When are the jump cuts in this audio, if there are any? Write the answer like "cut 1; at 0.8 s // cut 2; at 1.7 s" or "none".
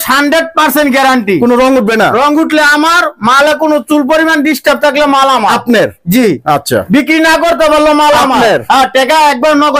none